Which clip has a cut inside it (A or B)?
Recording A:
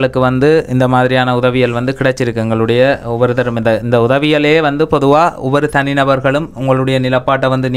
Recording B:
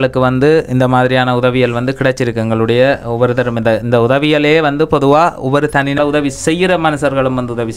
B